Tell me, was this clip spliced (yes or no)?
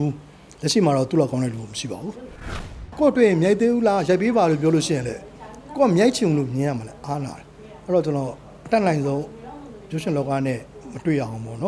yes